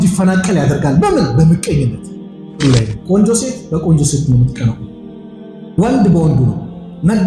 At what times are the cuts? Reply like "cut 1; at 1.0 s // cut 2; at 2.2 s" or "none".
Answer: cut 1; at 2.5 s